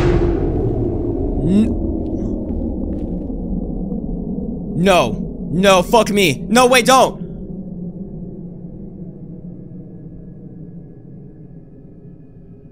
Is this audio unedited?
yes; 0 cuts

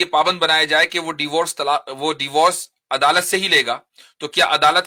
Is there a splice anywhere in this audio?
no; 0 cuts

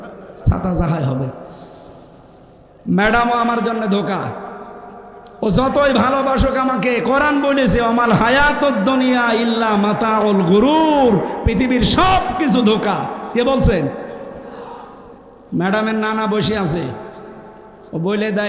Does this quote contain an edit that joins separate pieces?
no; 0 cuts

